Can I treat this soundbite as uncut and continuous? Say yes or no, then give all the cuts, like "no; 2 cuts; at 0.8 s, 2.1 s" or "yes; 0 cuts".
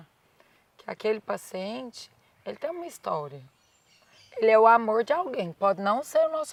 yes; 0 cuts